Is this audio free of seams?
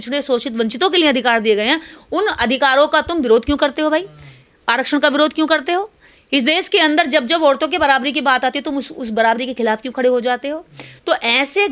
yes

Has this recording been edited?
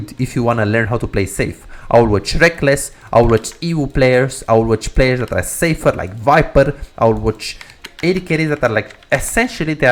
no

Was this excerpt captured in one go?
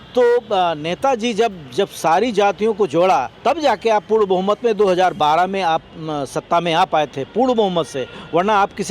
no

